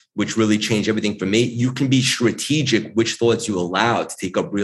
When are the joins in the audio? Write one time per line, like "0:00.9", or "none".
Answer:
none